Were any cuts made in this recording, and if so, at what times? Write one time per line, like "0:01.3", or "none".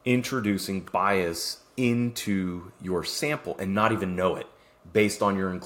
none